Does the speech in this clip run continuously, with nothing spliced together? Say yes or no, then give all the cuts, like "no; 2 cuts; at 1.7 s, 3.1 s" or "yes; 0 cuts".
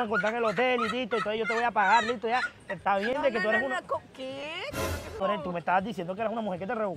no; 1 cut; at 5.2 s